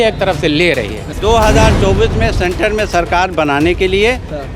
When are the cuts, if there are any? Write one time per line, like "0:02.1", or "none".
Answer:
0:01.1